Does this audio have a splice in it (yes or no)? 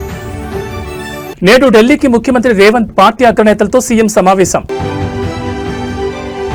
no